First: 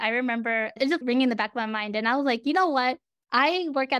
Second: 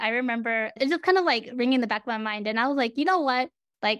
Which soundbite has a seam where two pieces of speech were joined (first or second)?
first